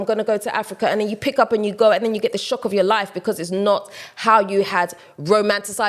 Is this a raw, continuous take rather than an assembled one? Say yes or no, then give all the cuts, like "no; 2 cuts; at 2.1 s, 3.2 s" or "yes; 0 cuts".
yes; 0 cuts